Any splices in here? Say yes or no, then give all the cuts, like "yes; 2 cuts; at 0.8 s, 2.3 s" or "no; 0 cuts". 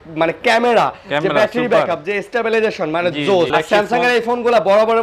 yes; 1 cut; at 3.5 s